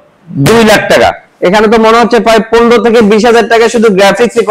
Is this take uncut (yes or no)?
yes